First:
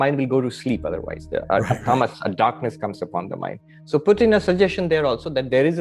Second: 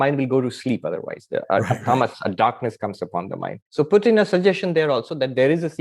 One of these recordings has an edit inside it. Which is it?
second; 1 cut; at 3.6 s

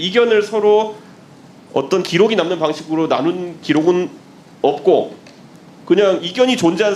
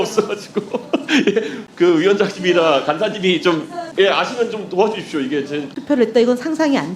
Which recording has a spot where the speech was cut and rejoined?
second; 3 cuts; at 1.6 s, 3.8 s, 5.8 s

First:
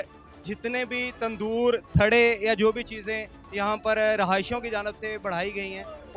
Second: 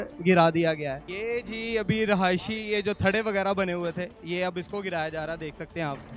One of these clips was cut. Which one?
second; 1 cut; at 1.4 s

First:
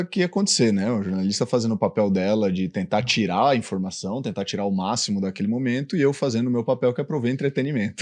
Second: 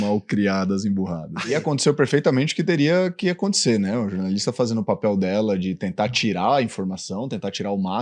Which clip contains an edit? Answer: second; 1 cut; at 1.6 s

